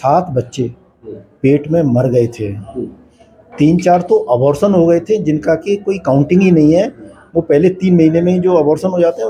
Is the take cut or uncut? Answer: uncut